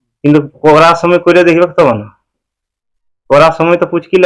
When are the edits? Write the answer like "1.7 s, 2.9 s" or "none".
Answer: none